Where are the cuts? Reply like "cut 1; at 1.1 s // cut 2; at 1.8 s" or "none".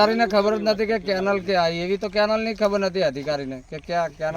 none

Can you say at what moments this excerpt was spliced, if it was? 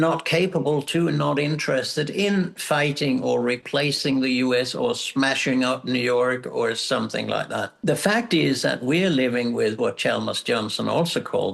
cut 1; at 7.7 s

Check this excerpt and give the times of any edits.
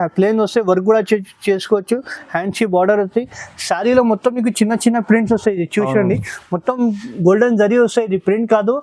none

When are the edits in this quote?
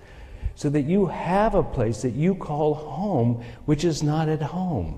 none

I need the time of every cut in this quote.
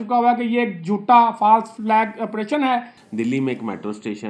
cut 1; at 1.7 s // cut 2; at 3.0 s

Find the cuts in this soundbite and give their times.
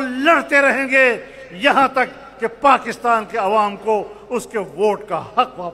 none

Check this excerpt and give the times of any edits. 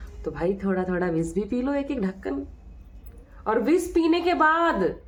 none

